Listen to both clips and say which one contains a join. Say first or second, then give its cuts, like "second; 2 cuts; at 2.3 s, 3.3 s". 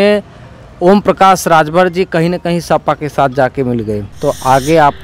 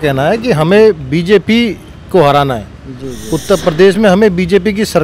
first; 1 cut; at 4.1 s